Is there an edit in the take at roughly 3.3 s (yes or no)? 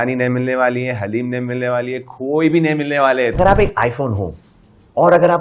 yes